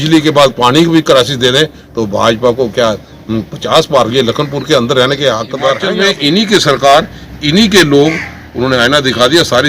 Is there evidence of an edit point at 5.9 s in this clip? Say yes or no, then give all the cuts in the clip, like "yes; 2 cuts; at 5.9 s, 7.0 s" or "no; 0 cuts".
yes; 1 cut; at 5.9 s